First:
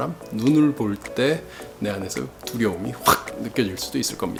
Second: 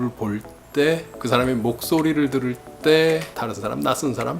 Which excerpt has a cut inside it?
second; 2 cuts; at 1.1 s, 3.3 s

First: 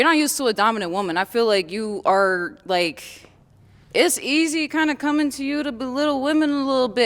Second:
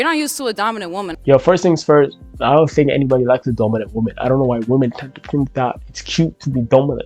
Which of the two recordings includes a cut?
first; 1 cut; at 1.1 s

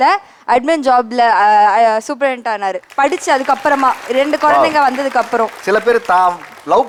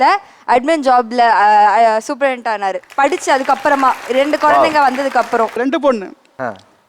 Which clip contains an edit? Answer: second; 1 cut; at 5.5 s

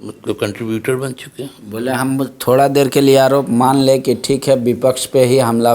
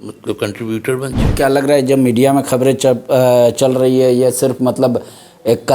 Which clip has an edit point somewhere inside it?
second; 1 cut; at 1.2 s

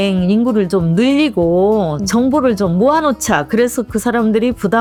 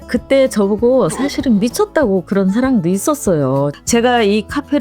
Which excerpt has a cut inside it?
second; 1 cut; at 3.7 s

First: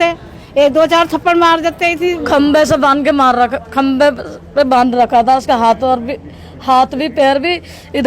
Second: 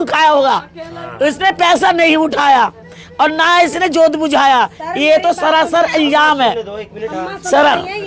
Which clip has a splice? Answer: first; 1 cut; at 2.1 s

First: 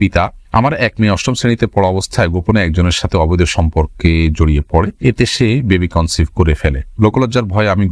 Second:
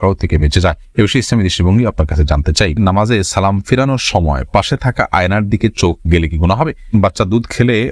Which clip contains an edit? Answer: second; 2 cuts; at 2.8 s, 6.9 s

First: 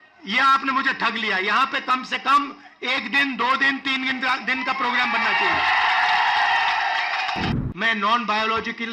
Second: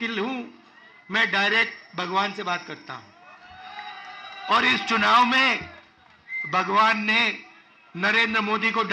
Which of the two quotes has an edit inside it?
first; 1 cut; at 7.5 s

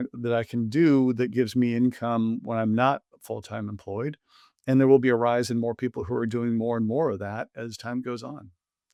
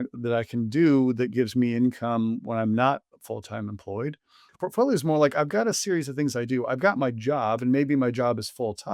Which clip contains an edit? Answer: second; 1 cut; at 4.4 s

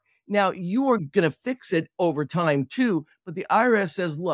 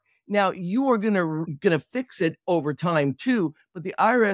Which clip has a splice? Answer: first; 1 cut; at 1.0 s

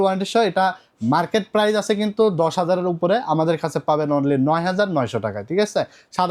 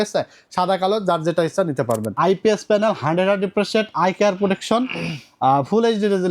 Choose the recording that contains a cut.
second; 1 cut; at 2.1 s

